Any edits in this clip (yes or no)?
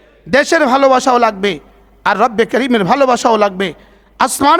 no